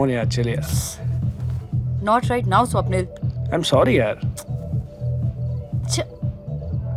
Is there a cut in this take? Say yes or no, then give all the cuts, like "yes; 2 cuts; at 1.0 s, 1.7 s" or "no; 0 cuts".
no; 0 cuts